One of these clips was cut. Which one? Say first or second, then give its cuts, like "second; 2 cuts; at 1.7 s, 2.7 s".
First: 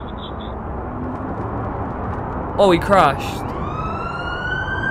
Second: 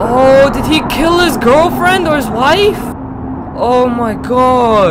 second; 1 cut; at 2.9 s